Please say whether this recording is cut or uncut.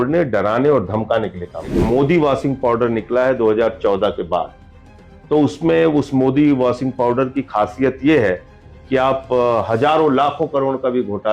cut